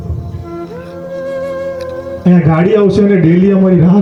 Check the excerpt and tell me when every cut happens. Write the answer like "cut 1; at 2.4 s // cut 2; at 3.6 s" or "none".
none